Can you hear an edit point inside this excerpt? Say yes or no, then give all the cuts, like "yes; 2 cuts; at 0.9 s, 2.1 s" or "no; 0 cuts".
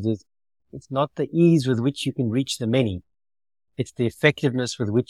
no; 0 cuts